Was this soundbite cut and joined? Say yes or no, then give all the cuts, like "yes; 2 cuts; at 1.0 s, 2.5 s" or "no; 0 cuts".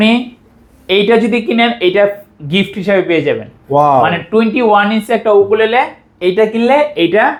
no; 0 cuts